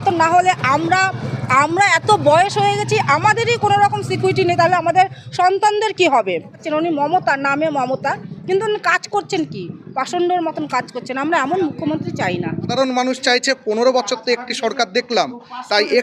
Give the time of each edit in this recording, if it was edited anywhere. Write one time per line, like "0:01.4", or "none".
0:06.6
0:12.7